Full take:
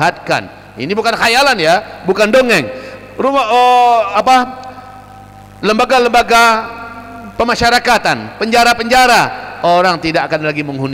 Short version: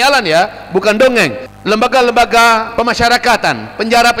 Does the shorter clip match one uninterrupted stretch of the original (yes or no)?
no